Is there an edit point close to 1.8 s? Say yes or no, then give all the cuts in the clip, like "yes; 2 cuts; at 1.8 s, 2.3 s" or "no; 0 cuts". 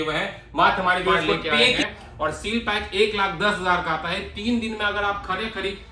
yes; 1 cut; at 1.8 s